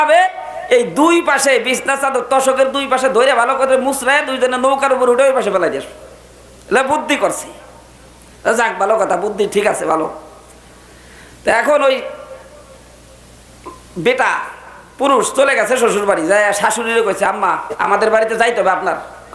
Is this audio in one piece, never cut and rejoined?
no; 1 cut; at 17.7 s

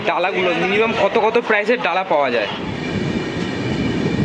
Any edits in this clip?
yes; 1 cut; at 2.7 s

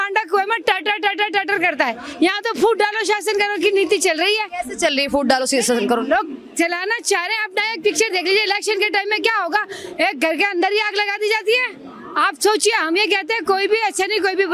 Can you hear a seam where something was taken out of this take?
no; 0 cuts

